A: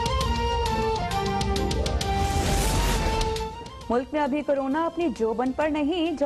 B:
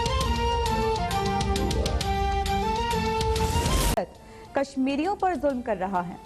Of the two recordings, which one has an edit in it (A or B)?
A